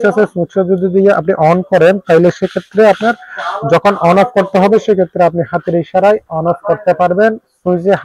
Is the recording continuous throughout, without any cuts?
yes; 0 cuts

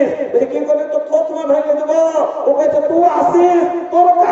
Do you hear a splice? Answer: no; 0 cuts

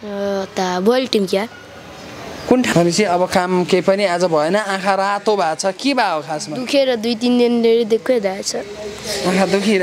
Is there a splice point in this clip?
yes; 1 cut; at 2.7 s

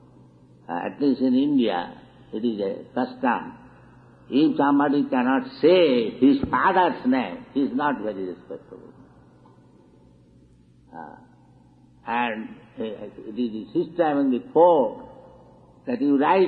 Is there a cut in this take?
yes; 1 cut; at 13.7 s

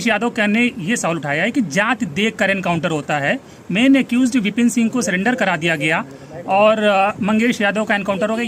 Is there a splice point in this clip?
no; 0 cuts

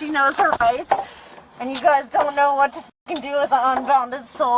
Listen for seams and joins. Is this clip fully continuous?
yes; 0 cuts

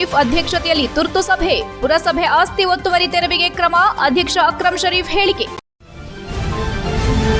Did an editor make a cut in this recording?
yes; 1 cut; at 5.6 s

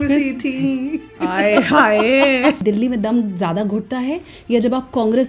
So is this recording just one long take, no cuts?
no; 1 cut; at 2.6 s

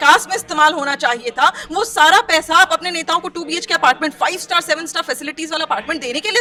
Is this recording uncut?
yes; 0 cuts

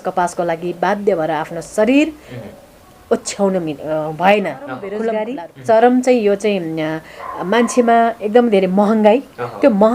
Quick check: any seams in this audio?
yes; 1 cut; at 5.0 s

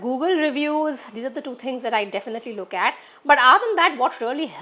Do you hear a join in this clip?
no; 0 cuts

